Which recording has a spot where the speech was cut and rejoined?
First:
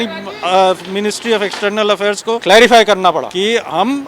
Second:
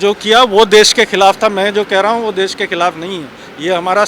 first; 2 cuts; at 2.4 s, 3.3 s

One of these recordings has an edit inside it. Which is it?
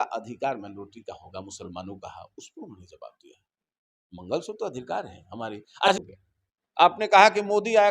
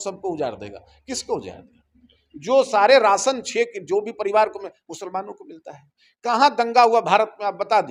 first; 1 cut; at 5.9 s

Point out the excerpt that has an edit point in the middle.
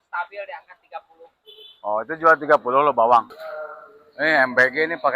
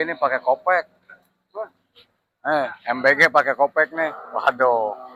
first; 1 cut; at 3.4 s

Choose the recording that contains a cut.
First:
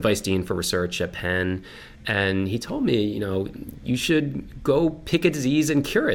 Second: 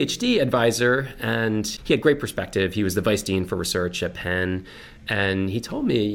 second; 1 cut; at 1.7 s

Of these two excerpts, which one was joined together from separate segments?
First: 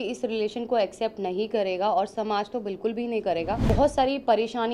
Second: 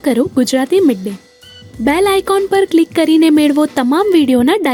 first; 1 cut; at 3.6 s

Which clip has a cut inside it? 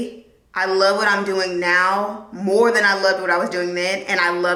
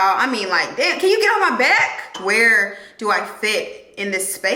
second; 1 cut; at 2.2 s

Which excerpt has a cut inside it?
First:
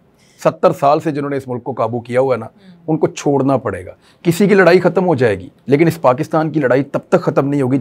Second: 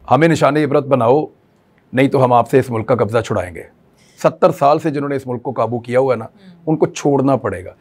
first; 1 cut; at 5.5 s

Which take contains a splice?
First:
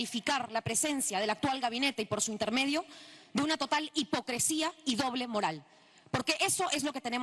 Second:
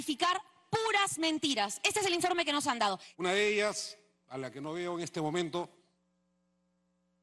second; 1 cut; at 3.1 s

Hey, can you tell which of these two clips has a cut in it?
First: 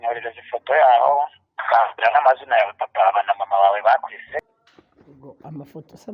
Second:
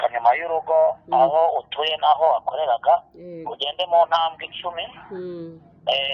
first; 1 cut; at 4.4 s

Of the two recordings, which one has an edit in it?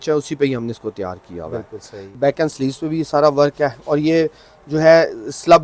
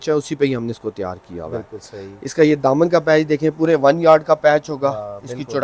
first; 1 cut; at 2.2 s

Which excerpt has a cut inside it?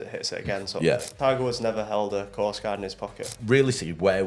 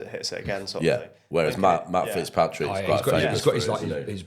first; 2 cuts; at 1.1 s, 3.3 s

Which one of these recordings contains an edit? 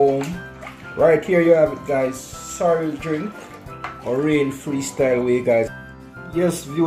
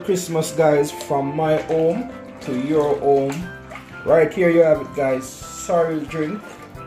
first; 1 cut; at 5.7 s

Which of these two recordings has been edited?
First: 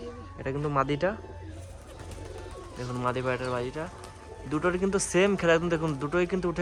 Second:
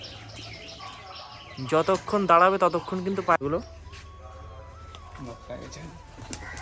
second; 1 cut; at 3.4 s

